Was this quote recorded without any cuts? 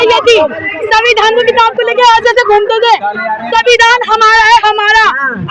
yes; 0 cuts

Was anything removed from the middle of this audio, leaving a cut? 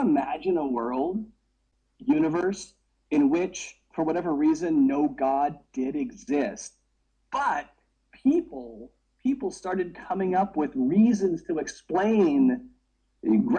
no; 0 cuts

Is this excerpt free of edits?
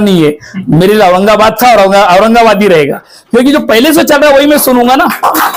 yes; 0 cuts

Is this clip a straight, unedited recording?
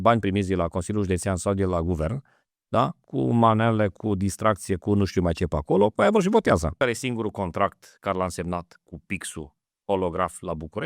no; 1 cut; at 6.8 s

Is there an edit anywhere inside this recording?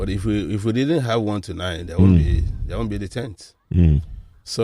no; 0 cuts

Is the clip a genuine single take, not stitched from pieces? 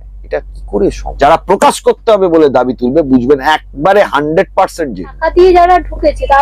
no; 2 cuts; at 1.1 s, 5.2 s

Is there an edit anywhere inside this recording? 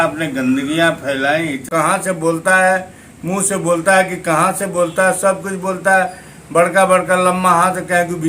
yes; 1 cut; at 1.7 s

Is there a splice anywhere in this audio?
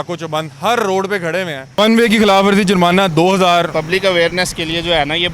yes; 2 cuts; at 1.8 s, 3.7 s

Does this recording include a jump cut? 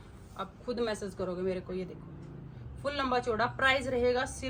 no; 0 cuts

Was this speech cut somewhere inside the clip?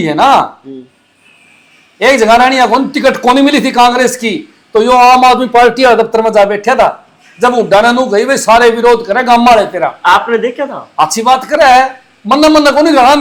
no; 0 cuts

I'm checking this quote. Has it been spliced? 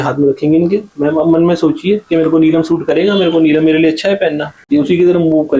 yes; 1 cut; at 4.5 s

